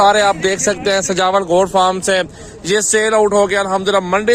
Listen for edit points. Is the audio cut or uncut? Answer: uncut